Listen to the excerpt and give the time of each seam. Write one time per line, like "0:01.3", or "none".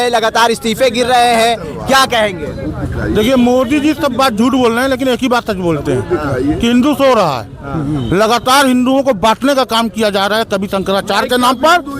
none